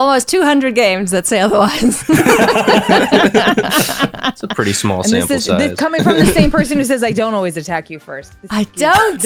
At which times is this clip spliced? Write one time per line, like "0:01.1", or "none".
none